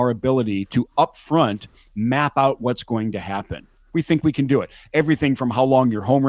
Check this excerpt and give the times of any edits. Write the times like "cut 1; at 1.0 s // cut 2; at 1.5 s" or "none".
none